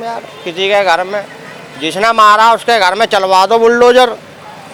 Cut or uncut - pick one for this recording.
uncut